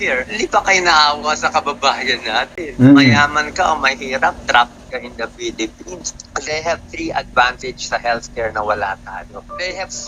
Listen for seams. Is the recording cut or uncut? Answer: uncut